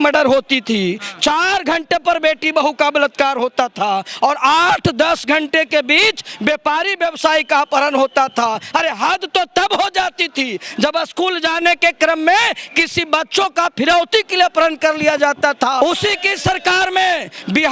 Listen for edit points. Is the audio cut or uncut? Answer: cut